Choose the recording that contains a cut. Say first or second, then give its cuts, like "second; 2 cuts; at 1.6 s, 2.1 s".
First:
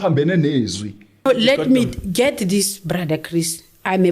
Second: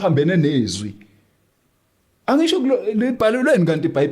first; 1 cut; at 1.2 s